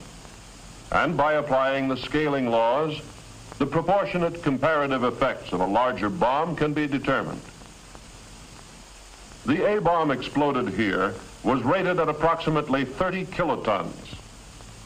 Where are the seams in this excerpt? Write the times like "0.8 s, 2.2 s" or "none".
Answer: none